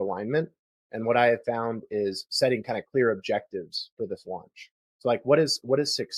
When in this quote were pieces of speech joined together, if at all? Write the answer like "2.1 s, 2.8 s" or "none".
none